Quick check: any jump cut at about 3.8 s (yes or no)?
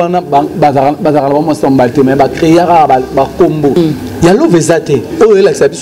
yes